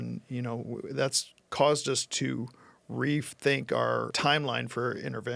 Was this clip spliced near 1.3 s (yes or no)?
no